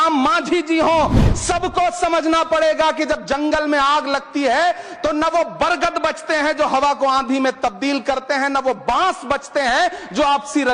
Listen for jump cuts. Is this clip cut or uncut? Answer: uncut